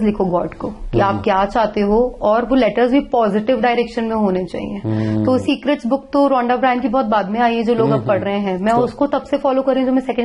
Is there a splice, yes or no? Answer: no